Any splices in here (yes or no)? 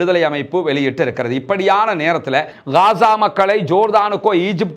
yes